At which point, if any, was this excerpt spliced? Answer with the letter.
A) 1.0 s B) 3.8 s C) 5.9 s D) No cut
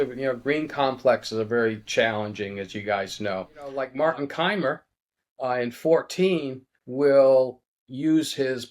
B